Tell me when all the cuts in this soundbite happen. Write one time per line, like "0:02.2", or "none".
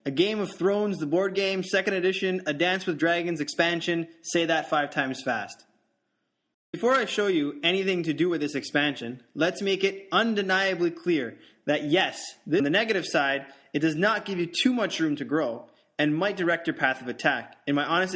none

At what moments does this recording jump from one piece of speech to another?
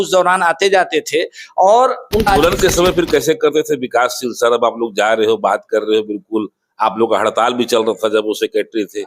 0:02.3

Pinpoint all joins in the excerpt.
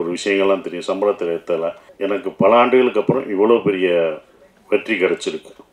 0:01.9

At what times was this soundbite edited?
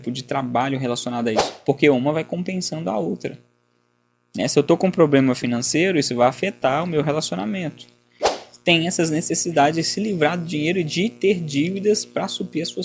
0:01.5
0:08.2

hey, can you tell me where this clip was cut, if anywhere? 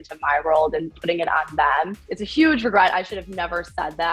0:02.1

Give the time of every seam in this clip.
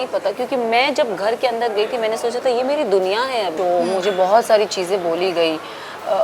0:03.5

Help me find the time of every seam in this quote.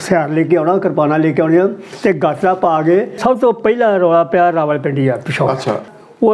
0:03.1

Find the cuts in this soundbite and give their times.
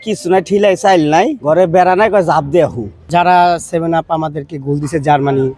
0:03.1

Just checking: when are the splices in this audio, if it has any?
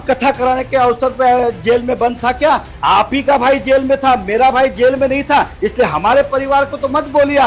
none

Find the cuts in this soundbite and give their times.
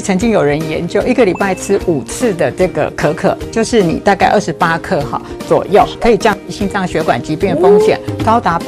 none

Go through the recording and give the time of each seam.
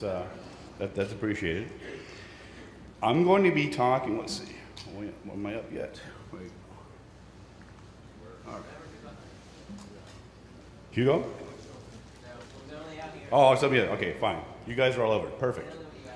0:09.7

